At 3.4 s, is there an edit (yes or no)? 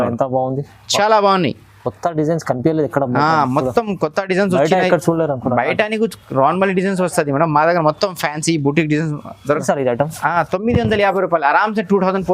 no